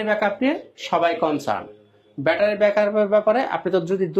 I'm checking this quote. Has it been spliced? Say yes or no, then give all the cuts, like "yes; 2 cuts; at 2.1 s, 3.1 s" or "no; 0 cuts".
no; 0 cuts